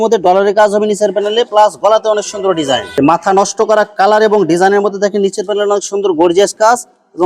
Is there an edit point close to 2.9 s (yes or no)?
yes